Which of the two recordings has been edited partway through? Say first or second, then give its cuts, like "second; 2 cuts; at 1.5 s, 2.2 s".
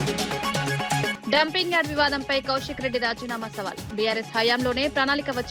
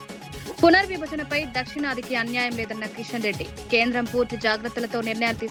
first; 1 cut; at 1.1 s